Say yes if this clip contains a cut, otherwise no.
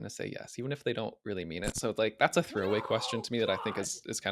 no